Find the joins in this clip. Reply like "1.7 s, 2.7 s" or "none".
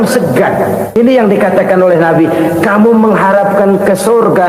0.9 s